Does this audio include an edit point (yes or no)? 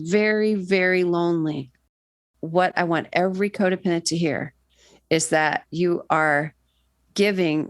yes